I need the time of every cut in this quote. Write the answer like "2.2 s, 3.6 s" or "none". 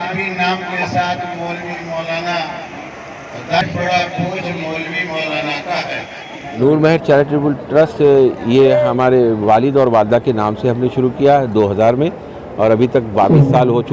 6.4 s